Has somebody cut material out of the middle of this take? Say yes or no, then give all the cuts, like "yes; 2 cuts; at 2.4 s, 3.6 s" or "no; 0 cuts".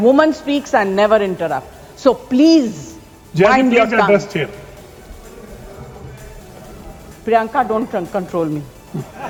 no; 0 cuts